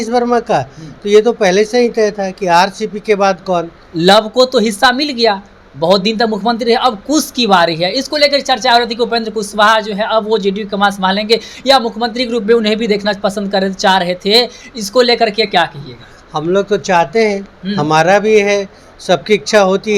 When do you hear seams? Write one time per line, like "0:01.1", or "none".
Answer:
0:03.8